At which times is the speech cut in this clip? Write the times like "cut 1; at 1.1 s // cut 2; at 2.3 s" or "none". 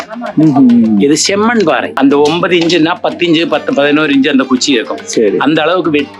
cut 1; at 1.9 s